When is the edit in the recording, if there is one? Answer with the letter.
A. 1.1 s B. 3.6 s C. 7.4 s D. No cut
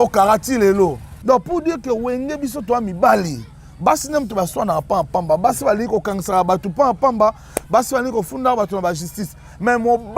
A